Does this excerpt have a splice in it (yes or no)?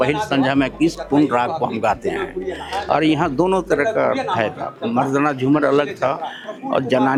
no